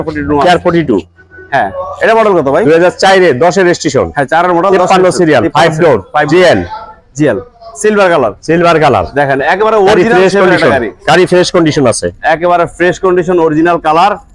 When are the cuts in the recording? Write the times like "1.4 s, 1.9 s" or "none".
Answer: none